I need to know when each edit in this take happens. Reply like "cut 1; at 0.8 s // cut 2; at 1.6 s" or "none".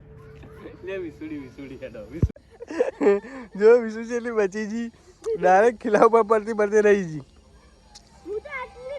cut 1; at 2.5 s